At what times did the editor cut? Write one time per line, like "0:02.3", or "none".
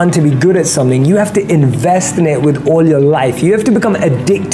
none